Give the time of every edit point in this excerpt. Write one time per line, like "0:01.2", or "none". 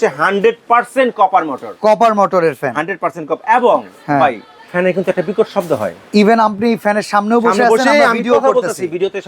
none